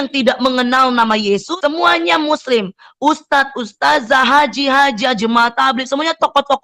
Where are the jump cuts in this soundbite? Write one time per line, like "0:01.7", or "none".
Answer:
0:01.5